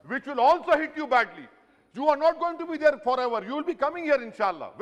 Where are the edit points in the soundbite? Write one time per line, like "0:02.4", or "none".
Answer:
none